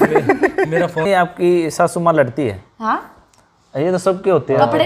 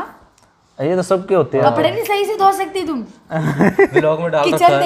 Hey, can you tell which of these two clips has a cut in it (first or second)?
first